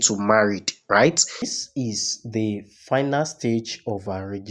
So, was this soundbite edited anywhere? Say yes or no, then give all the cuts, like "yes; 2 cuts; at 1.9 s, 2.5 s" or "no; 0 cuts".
yes; 1 cut; at 1.5 s